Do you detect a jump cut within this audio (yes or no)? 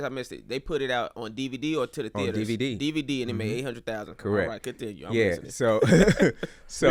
no